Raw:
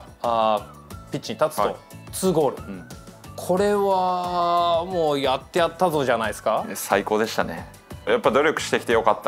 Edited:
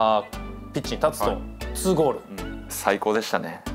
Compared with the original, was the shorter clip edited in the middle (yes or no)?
yes